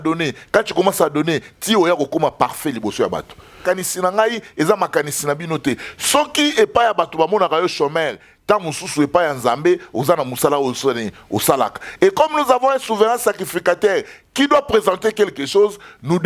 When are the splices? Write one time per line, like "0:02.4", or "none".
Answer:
0:03.6